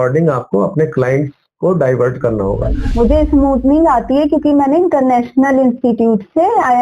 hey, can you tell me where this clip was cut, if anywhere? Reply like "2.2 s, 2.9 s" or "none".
2.8 s